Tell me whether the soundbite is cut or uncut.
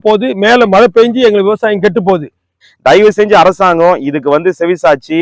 cut